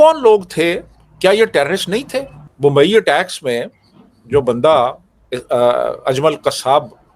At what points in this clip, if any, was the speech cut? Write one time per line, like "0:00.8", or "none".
0:02.4